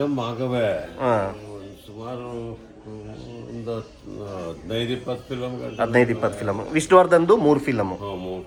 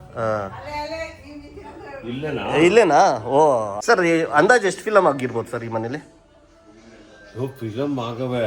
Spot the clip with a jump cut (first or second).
second